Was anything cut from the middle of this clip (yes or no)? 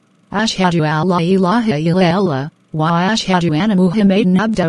no